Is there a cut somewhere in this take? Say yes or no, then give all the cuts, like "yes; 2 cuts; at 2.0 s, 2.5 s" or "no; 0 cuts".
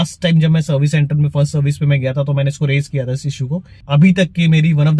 yes; 1 cut; at 3.8 s